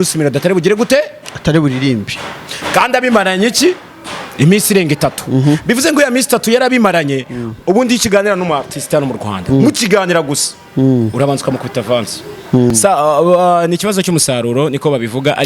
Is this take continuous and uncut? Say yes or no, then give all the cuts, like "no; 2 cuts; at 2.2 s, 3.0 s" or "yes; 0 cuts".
no; 1 cut; at 12.7 s